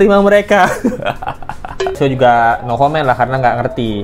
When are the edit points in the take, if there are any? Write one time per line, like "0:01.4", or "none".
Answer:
0:02.0